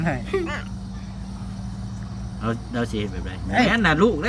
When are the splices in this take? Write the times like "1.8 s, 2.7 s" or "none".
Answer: none

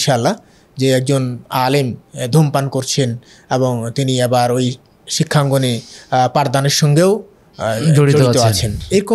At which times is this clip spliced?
none

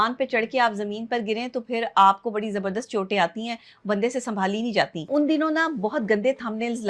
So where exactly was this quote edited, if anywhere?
5.0 s

